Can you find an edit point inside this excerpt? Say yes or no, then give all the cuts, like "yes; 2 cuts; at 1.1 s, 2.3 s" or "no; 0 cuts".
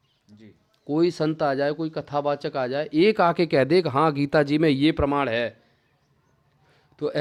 no; 0 cuts